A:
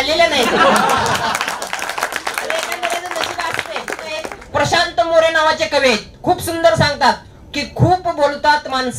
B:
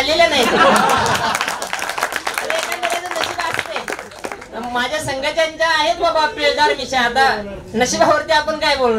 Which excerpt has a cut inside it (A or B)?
A